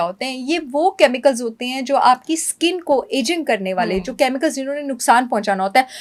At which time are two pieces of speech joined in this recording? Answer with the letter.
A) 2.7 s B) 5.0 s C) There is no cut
C